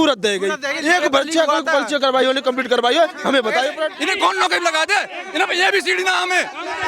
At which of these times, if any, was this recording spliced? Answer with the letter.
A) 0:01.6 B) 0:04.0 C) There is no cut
B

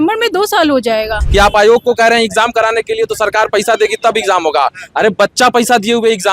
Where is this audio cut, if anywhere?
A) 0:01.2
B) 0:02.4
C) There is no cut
A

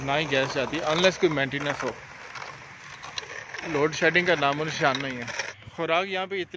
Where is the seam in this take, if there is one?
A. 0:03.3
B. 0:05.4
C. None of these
B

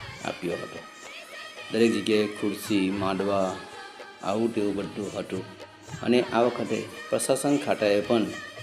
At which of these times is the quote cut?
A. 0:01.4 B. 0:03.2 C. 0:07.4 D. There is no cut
C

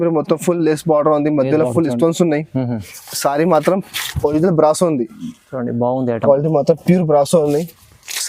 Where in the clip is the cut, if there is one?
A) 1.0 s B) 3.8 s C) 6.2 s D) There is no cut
D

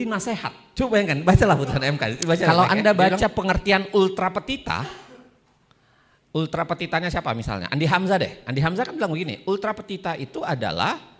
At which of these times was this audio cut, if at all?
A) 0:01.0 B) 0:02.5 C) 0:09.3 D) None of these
B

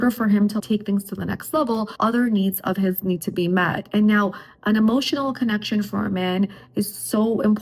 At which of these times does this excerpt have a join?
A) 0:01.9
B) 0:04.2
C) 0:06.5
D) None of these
A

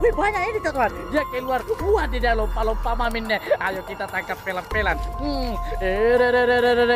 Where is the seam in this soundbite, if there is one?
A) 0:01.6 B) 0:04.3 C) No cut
C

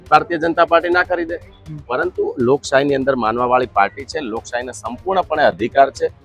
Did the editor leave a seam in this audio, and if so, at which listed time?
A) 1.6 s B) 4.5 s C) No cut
C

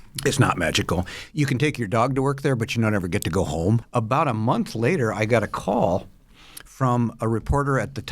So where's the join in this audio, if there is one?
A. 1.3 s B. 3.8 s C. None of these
B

